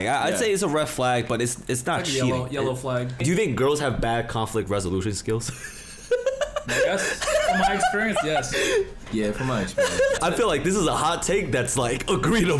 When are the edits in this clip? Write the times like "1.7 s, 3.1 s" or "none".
3.1 s, 10.2 s